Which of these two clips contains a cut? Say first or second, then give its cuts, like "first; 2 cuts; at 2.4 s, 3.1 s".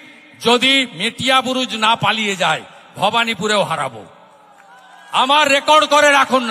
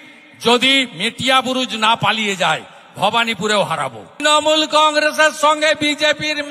second; 1 cut; at 4.2 s